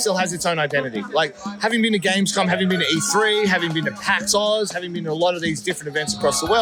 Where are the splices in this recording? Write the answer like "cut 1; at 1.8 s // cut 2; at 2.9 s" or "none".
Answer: none